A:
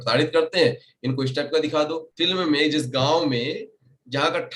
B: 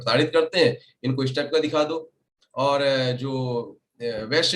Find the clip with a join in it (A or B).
A